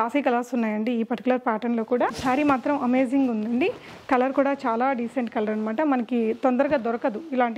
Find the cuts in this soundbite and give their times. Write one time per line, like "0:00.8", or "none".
0:02.2